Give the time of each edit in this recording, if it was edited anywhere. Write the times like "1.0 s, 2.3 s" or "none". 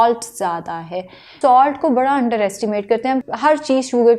1.3 s